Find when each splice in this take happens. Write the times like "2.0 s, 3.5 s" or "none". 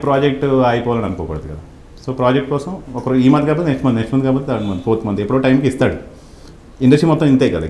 none